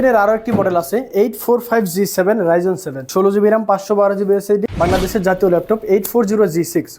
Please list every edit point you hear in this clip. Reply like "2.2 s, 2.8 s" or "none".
2.9 s, 4.7 s